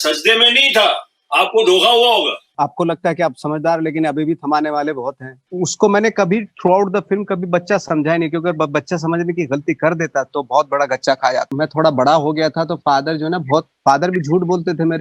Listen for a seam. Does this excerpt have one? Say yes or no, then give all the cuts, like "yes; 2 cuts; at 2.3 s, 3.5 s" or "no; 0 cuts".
yes; 3 cuts; at 2.5 s, 5.4 s, 11.5 s